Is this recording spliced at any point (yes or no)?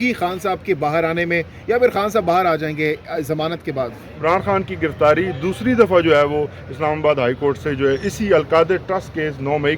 yes